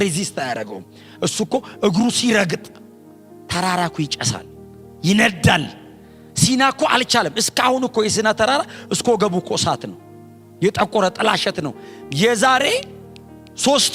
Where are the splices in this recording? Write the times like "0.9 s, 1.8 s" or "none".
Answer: none